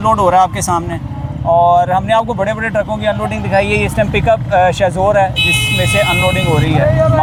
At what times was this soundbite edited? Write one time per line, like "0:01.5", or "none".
none